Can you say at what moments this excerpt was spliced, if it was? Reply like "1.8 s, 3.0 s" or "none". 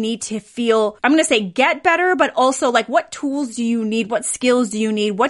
1.0 s